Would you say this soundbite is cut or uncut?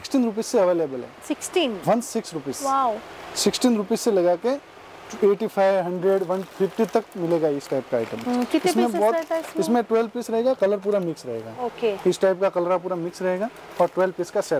uncut